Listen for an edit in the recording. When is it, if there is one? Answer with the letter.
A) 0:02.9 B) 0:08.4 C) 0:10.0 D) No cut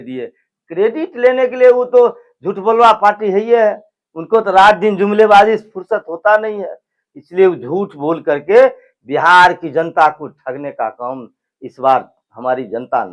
D